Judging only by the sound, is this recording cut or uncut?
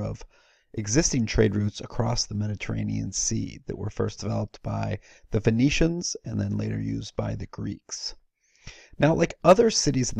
cut